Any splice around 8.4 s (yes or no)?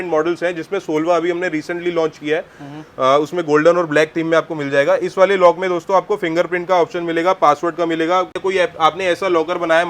yes